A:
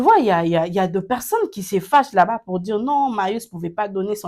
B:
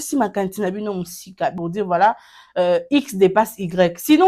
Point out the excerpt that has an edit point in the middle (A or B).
B